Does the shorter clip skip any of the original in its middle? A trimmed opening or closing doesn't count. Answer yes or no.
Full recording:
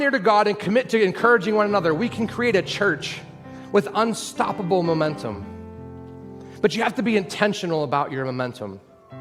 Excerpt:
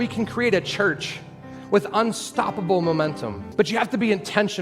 yes